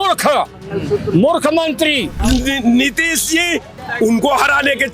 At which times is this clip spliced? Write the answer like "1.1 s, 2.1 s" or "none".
2.1 s, 3.8 s